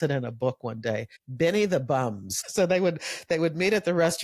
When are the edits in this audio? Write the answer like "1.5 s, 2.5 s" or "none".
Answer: 1.2 s, 2.4 s